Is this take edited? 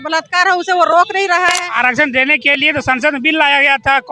yes; 1 cut; at 1.7 s

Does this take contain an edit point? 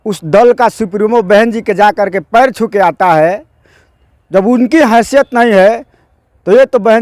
no; 0 cuts

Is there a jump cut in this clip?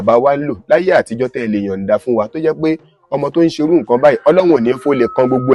no; 0 cuts

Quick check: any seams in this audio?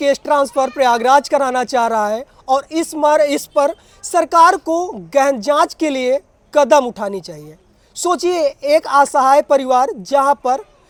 no; 0 cuts

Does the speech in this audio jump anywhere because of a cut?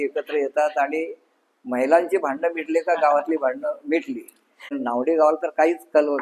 yes; 1 cut; at 4.7 s

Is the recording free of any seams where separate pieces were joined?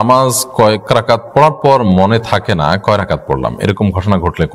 yes; 0 cuts

